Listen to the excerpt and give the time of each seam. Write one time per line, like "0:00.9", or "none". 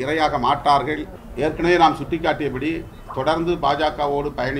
0:01.1